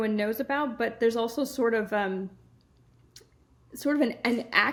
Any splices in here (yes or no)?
no